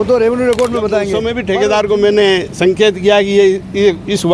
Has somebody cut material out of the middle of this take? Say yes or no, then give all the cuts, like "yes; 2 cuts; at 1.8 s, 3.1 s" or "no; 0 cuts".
yes; 1 cut; at 1.4 s